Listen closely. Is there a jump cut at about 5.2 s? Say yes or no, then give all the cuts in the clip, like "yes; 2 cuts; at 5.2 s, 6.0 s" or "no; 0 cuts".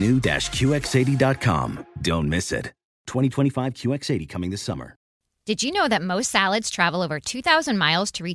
yes; 1 cut; at 5.2 s